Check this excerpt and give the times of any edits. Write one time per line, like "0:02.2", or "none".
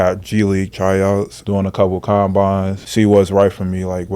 0:01.4
0:02.8